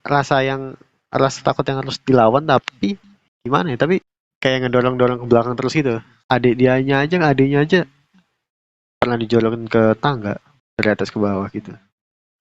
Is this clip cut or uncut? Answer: cut